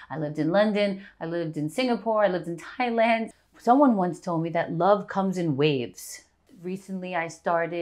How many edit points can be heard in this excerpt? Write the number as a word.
two